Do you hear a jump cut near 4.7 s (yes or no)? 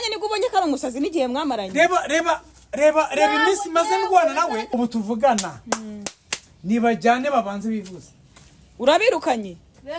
yes